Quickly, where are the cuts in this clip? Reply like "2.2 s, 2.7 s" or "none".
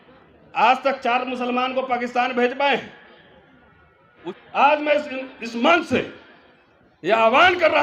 4.2 s

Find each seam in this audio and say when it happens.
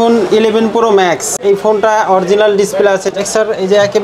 1.3 s, 3.1 s

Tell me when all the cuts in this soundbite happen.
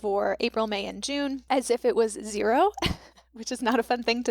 1.4 s

